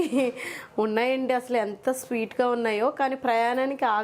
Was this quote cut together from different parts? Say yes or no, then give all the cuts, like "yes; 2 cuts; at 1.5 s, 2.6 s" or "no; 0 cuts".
no; 0 cuts